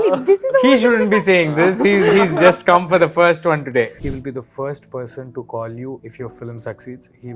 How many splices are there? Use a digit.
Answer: 1